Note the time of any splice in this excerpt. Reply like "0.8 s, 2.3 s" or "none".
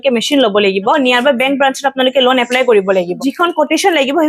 1.0 s, 3.1 s